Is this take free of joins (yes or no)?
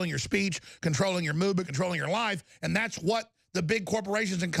yes